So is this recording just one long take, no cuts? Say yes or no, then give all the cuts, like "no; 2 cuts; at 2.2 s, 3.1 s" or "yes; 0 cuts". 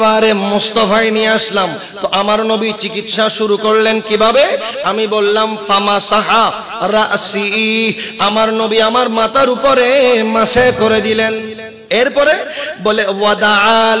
no; 1 cut; at 11.7 s